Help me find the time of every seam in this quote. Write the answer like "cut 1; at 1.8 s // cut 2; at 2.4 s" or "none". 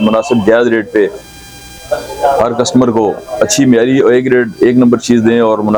none